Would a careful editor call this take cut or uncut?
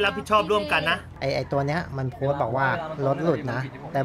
cut